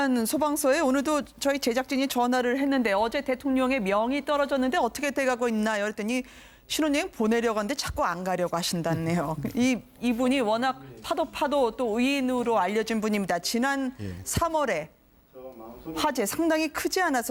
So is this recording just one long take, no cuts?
yes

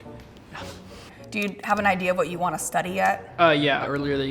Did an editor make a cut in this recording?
no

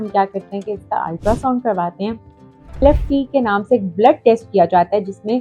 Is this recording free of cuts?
no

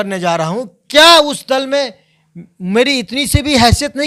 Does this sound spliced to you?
no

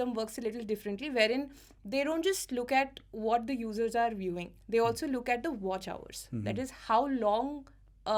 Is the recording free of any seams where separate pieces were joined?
yes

